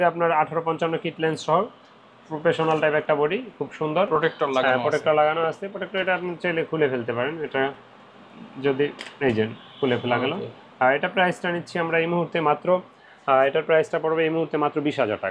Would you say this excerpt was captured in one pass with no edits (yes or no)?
yes